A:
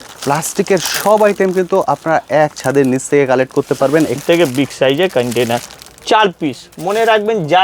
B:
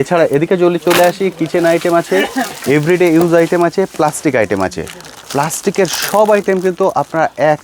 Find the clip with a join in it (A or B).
A